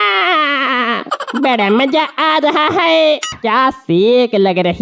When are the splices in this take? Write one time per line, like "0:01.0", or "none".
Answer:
0:03.3